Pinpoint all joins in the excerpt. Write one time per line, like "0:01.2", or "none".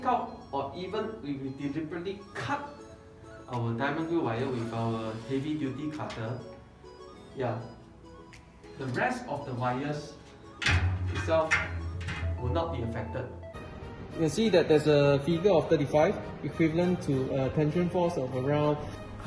0:13.5